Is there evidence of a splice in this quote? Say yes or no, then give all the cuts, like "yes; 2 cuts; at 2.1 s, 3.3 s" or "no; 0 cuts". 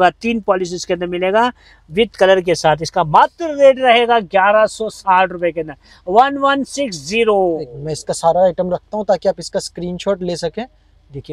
no; 0 cuts